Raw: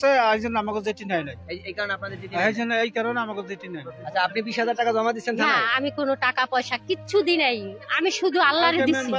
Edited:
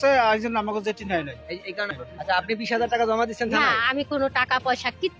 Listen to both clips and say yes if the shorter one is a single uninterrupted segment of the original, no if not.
no